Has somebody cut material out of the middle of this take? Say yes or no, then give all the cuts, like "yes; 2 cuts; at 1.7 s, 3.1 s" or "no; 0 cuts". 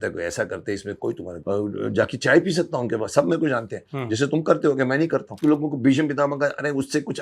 yes; 2 cuts; at 1.3 s, 5.3 s